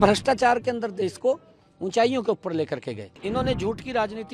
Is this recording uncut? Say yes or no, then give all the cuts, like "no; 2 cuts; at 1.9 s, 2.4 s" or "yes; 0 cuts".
no; 1 cut; at 3.2 s